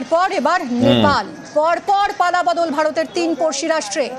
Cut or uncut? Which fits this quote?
uncut